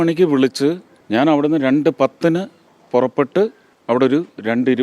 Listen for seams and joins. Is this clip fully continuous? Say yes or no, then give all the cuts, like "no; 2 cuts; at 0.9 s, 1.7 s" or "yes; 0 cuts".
no; 2 cuts; at 0.9 s, 3.7 s